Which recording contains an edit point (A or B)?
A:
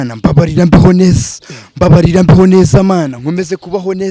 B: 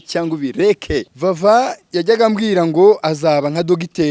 B